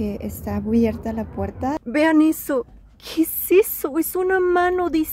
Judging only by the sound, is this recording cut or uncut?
cut